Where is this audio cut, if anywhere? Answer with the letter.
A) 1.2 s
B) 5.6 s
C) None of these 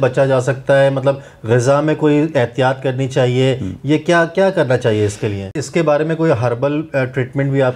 B